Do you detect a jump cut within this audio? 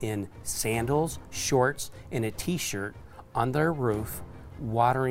no; 0 cuts

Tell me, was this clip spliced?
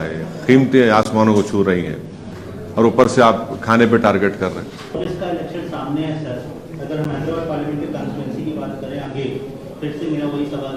no; 0 cuts

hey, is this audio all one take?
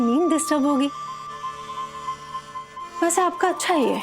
yes; 0 cuts

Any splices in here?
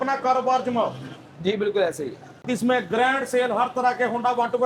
yes; 1 cut; at 2.4 s

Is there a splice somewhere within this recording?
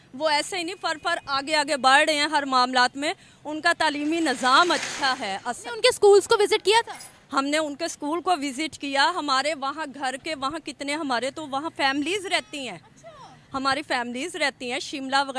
no; 0 cuts

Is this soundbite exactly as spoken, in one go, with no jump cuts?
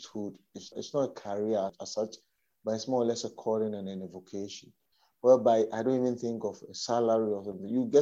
no; 2 cuts; at 0.7 s, 1.8 s

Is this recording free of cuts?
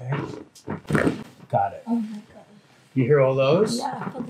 yes; 0 cuts

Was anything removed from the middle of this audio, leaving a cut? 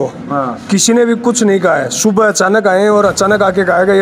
no; 0 cuts

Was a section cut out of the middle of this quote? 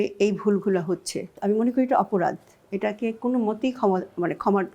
yes; 1 cut; at 1.3 s

